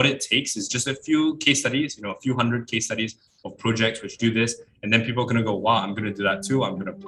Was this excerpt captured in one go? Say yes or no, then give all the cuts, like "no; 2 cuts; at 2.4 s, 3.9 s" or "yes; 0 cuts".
yes; 0 cuts